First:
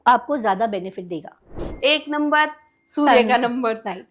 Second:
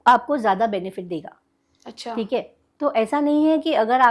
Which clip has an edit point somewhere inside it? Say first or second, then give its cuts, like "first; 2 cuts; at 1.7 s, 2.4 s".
first; 1 cut; at 1.6 s